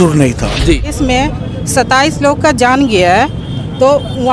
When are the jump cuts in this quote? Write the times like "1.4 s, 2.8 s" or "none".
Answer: 0.9 s